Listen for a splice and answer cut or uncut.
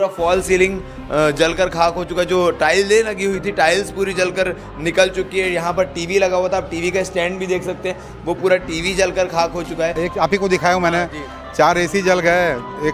cut